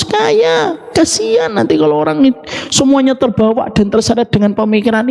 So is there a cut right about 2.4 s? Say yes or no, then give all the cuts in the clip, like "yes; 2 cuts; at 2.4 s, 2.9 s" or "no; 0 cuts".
no; 0 cuts